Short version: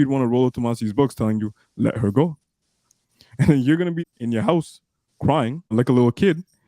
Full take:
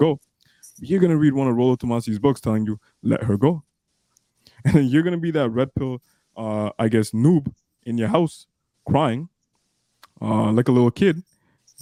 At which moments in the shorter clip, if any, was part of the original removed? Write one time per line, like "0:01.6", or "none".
0:04.0
0:05.7